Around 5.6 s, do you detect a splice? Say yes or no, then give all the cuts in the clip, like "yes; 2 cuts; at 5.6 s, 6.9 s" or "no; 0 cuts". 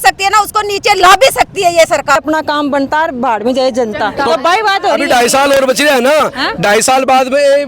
no; 1 cut; at 2.2 s